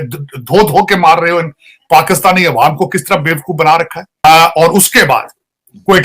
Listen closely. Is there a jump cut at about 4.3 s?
yes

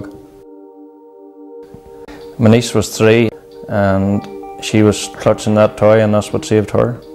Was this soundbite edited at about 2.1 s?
yes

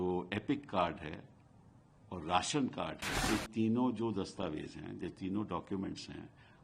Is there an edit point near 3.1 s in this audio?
yes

